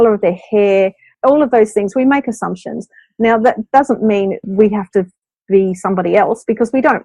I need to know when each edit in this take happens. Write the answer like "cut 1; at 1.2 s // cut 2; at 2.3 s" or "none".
cut 1; at 1.1 s // cut 2; at 4.4 s